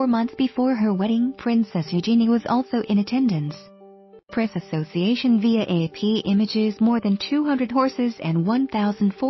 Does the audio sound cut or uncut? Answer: cut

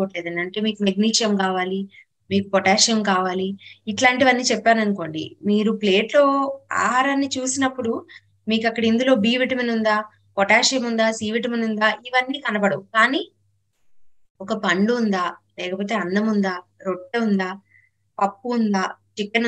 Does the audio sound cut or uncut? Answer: uncut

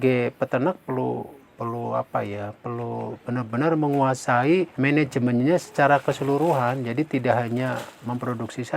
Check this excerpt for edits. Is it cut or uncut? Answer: cut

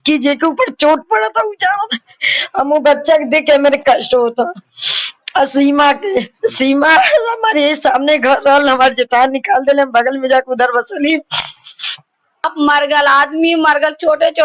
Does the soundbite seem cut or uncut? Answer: cut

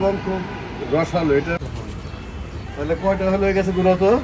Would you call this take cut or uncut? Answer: cut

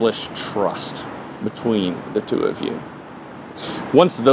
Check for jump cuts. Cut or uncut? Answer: uncut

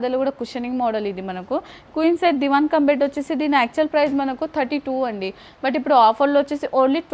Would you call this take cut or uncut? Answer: uncut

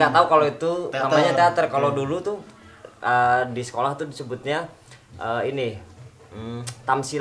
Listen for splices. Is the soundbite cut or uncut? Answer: uncut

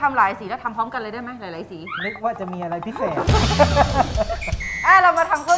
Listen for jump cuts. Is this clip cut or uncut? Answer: uncut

